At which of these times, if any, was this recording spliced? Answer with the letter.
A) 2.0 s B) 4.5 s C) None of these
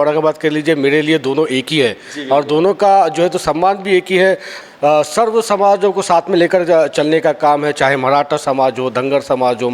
B